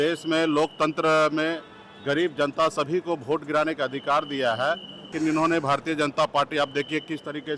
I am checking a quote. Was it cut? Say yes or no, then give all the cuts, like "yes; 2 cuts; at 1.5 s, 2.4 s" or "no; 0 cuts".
yes; 1 cut; at 5.1 s